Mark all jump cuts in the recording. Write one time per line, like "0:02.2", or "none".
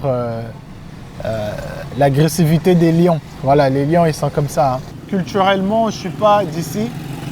0:04.9